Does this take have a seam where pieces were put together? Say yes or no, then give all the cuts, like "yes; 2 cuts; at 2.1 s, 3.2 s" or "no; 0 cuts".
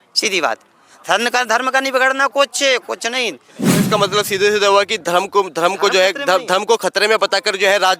yes; 1 cut; at 3.7 s